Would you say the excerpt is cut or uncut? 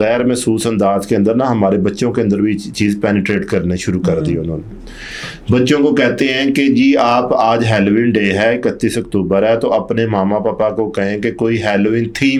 uncut